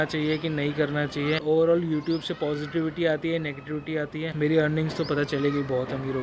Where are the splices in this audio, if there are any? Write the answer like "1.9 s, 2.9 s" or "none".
1.4 s, 4.3 s